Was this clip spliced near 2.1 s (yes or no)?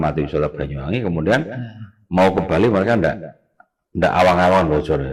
no